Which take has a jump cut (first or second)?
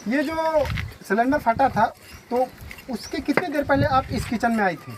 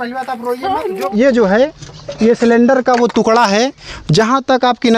second